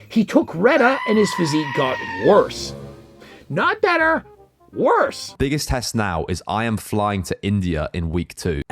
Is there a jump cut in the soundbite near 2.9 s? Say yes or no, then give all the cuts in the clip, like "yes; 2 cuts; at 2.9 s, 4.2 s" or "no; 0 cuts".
no; 1 cut; at 5.3 s